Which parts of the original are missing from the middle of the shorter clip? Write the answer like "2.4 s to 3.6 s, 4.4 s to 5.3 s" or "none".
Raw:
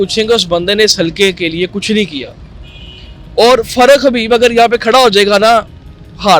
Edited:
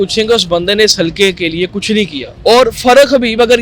2.2 s to 3.2 s